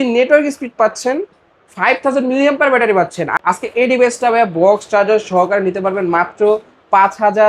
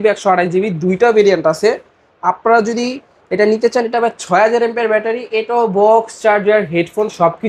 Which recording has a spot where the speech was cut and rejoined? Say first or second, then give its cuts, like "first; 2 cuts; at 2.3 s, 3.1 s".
first; 1 cut; at 3.4 s